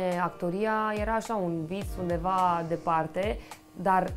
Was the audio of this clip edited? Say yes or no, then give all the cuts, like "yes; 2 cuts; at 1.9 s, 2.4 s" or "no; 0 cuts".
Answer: no; 0 cuts